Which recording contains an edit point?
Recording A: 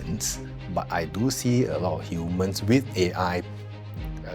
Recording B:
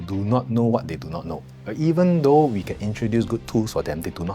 B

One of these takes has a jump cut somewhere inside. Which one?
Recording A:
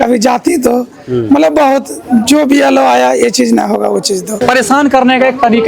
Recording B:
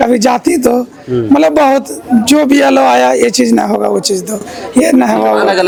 A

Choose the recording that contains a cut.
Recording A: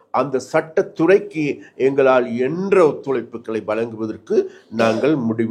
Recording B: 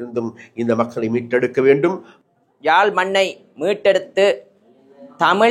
B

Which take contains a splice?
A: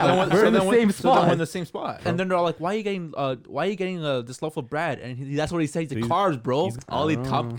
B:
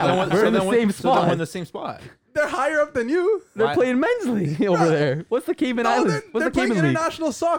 A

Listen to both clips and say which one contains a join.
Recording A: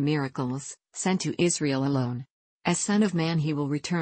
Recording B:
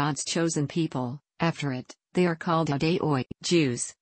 A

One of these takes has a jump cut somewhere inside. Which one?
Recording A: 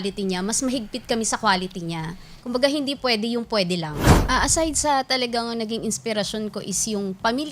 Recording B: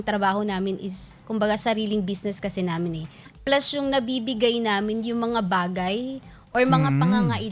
A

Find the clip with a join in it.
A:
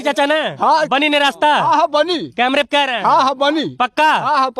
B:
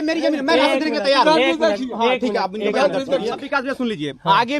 B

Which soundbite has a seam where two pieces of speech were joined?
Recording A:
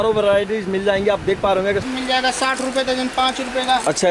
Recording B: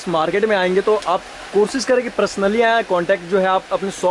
A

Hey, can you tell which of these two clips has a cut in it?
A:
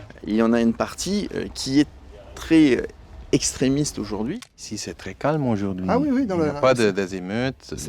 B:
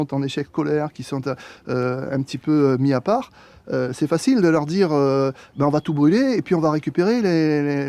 A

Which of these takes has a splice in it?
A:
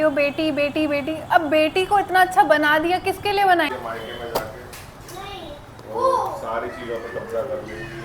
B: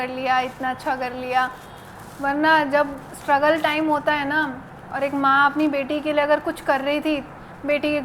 A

